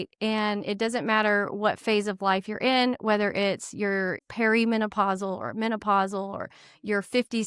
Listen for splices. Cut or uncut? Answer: cut